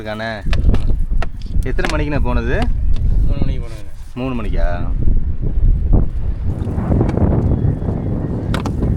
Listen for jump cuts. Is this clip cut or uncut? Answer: uncut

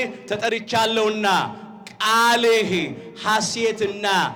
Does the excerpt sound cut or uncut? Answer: uncut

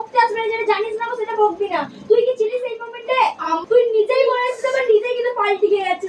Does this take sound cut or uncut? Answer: cut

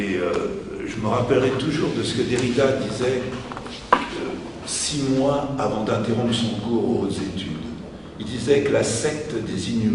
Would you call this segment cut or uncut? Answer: cut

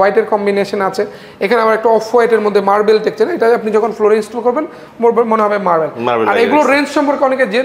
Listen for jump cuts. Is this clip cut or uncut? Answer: uncut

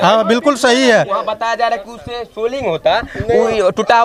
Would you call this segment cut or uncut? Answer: uncut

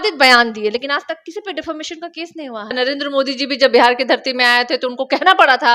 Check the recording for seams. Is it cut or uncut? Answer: cut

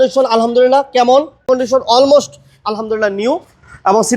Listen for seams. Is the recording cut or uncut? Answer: cut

